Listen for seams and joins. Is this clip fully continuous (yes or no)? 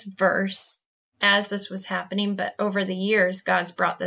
yes